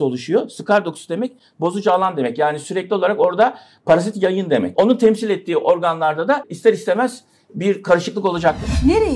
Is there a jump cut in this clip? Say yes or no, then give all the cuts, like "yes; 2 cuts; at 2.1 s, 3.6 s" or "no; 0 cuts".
yes; 2 cuts; at 4.7 s, 6.5 s